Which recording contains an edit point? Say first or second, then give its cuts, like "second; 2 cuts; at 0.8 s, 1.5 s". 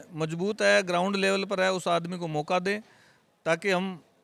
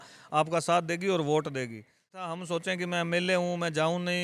second; 1 cut; at 2.2 s